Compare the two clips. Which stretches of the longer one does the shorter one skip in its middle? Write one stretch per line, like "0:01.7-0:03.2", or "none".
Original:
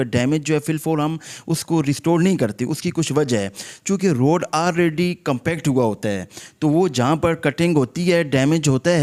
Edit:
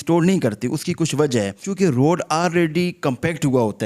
0:03.6-0:03.8